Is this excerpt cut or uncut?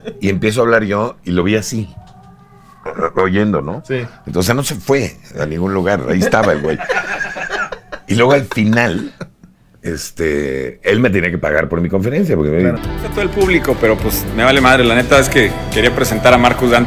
cut